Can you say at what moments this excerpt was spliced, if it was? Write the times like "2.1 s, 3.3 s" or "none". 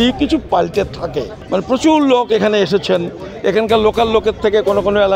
1.4 s